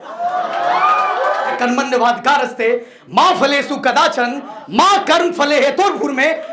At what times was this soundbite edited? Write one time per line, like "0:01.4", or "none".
0:01.6